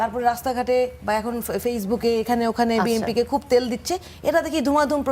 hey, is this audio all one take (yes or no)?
yes